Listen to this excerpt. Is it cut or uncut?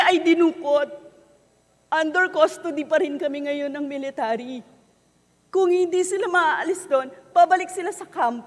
uncut